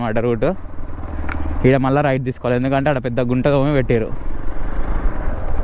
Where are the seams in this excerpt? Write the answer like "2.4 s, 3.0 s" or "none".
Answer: none